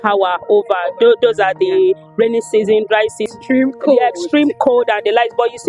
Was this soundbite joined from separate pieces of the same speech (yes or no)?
yes